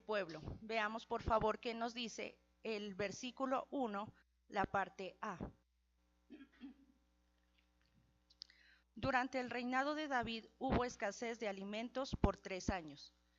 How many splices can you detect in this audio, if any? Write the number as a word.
one